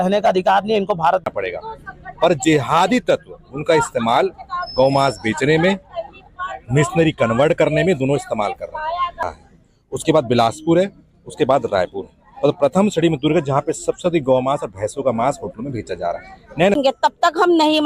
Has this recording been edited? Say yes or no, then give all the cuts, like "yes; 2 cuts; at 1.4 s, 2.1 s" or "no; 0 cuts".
yes; 3 cuts; at 1.3 s, 9.2 s, 16.7 s